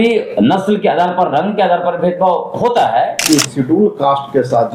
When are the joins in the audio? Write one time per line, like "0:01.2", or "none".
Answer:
0:03.2